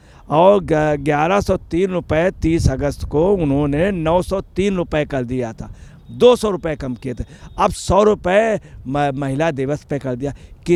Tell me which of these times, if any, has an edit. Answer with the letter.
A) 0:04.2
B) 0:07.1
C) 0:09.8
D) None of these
D